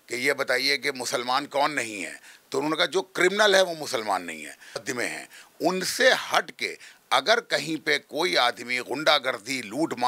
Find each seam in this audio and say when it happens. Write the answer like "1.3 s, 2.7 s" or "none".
4.8 s